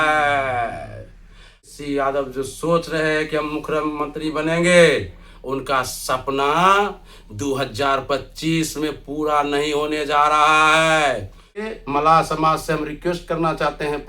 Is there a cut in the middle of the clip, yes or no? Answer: yes